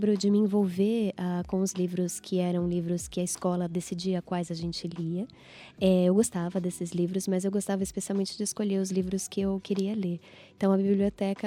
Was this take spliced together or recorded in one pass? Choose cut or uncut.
uncut